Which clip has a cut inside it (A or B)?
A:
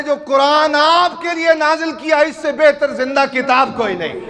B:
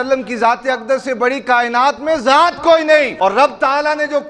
B